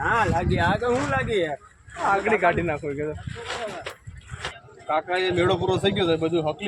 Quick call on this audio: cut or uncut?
uncut